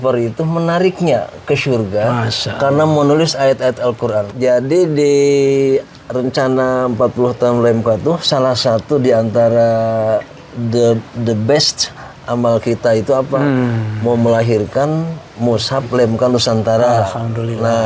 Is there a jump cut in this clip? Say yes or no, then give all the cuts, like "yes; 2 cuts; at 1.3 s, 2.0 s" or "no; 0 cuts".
yes; 1 cut; at 4.3 s